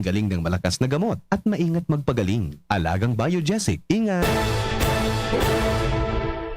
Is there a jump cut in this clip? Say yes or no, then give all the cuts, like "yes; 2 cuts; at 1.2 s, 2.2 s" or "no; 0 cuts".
yes; 1 cut; at 4.2 s